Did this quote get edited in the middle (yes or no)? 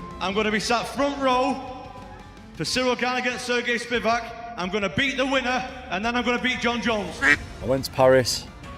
yes